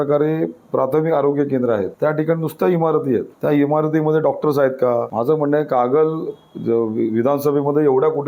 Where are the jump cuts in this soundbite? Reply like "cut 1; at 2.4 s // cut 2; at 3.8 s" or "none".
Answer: cut 1; at 1.9 s // cut 2; at 3.3 s // cut 3; at 5.1 s